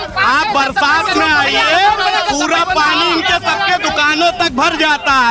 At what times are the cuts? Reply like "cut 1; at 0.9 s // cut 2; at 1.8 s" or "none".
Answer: none